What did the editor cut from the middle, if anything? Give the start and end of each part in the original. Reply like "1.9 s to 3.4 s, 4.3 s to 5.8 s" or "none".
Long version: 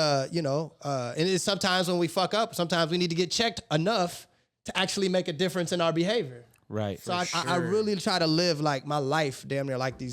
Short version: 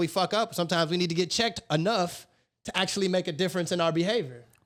none